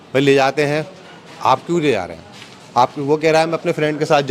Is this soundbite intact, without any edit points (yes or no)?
yes